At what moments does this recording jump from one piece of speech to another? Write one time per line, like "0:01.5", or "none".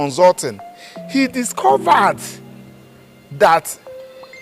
none